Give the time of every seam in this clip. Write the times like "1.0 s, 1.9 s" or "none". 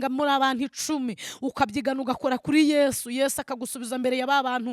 none